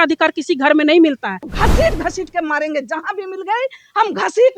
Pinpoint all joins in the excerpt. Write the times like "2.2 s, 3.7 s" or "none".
1.5 s